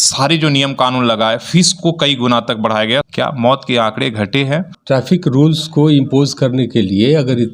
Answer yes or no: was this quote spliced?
yes